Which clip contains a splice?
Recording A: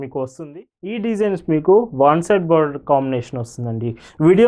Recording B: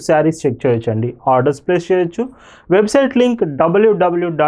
A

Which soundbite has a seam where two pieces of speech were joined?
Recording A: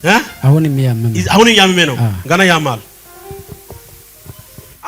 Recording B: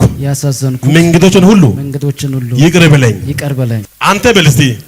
B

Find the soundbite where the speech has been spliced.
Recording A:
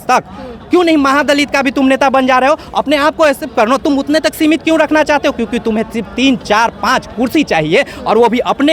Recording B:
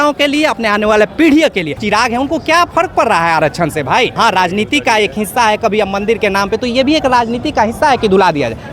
B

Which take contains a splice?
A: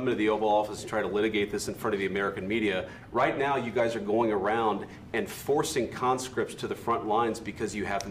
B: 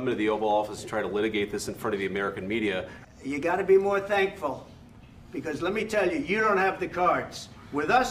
B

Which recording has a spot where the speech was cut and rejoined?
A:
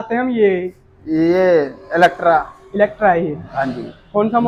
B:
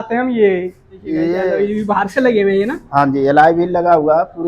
B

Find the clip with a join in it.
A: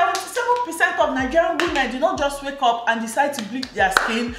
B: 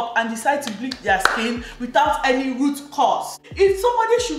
B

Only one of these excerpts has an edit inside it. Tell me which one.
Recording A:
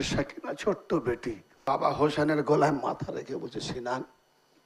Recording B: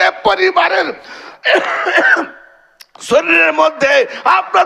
A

